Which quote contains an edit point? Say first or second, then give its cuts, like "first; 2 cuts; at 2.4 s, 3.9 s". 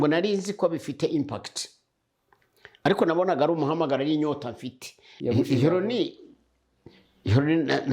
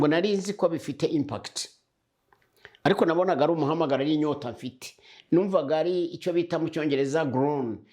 first; 1 cut; at 5.1 s